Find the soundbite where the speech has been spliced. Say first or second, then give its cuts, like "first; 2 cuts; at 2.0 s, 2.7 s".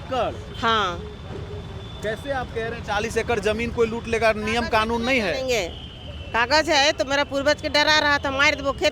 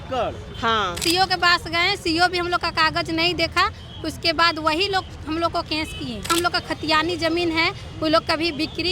second; 2 cuts; at 1.0 s, 6.3 s